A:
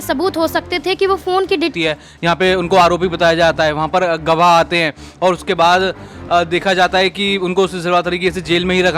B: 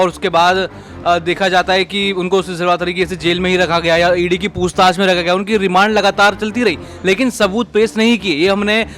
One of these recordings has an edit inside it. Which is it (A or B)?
A